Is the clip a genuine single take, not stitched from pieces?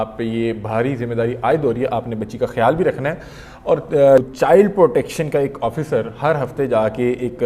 no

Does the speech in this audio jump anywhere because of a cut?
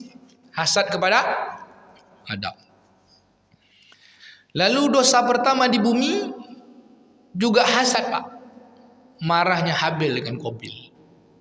no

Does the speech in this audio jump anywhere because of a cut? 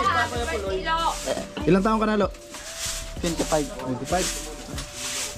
no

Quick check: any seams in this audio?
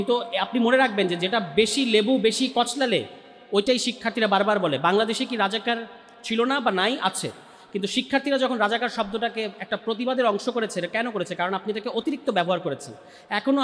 no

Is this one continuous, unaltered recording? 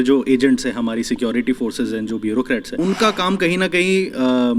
no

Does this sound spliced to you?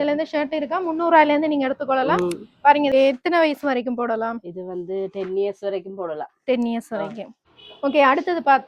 yes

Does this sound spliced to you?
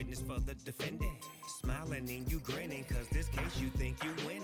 no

